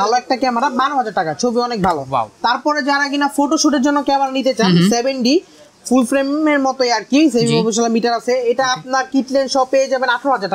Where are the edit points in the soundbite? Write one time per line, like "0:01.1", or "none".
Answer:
none